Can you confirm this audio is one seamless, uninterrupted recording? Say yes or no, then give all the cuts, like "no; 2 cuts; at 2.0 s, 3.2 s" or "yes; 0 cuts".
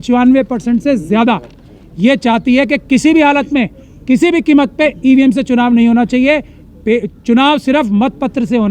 yes; 0 cuts